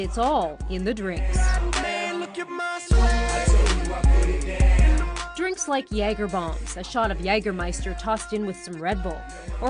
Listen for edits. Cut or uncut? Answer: cut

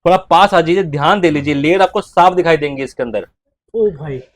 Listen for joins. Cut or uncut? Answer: uncut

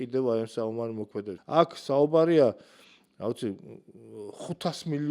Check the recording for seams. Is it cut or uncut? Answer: cut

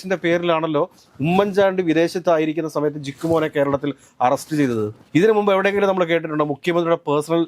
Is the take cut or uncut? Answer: uncut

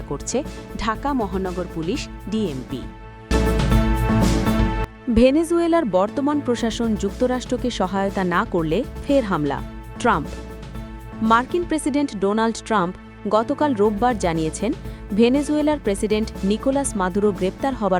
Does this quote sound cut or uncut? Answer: cut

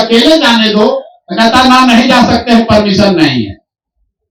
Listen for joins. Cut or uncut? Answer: uncut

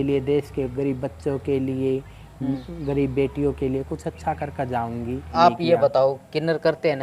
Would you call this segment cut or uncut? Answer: cut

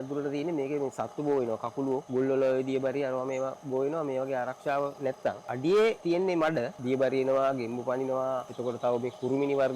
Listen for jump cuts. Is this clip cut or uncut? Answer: cut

